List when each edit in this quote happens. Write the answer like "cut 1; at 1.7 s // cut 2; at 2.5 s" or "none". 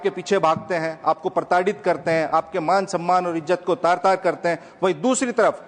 none